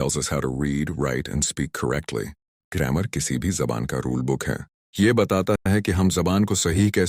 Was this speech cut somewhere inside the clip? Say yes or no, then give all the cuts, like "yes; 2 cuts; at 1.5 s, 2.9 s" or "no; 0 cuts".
no; 0 cuts